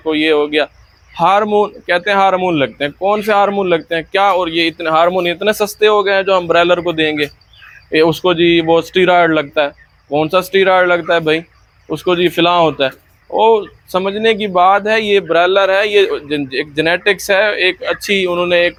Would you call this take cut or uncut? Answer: uncut